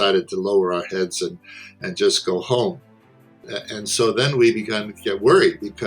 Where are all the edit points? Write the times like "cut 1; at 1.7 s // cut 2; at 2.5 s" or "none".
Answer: cut 1; at 3.3 s